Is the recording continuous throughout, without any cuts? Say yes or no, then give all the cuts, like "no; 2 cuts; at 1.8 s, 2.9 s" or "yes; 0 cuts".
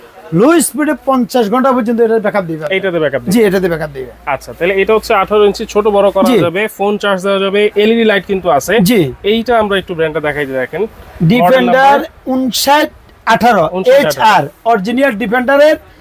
yes; 0 cuts